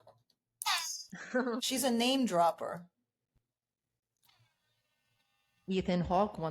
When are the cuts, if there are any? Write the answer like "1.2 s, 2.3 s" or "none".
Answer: 1.6 s